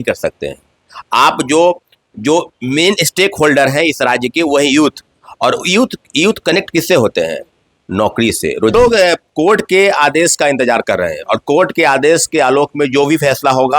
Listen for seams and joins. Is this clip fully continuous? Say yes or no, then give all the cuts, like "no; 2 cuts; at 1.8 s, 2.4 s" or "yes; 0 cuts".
no; 1 cut; at 8.7 s